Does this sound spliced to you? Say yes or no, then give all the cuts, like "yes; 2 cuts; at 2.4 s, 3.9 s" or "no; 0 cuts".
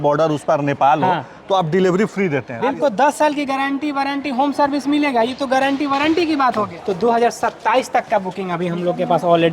yes; 2 cuts; at 2.6 s, 6.7 s